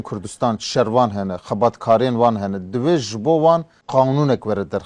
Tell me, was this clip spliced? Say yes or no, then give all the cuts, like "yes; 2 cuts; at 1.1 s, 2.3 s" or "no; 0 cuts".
yes; 1 cut; at 3.8 s